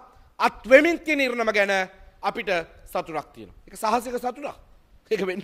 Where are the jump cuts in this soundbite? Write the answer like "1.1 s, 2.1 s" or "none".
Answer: none